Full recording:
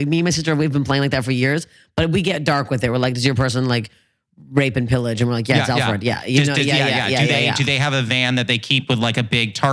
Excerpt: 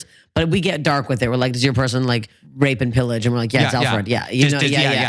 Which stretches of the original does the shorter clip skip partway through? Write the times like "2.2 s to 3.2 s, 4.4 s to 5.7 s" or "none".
4.0 s to 4.3 s